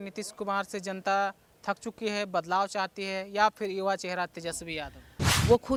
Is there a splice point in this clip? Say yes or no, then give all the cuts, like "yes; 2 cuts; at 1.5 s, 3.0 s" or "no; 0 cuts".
no; 0 cuts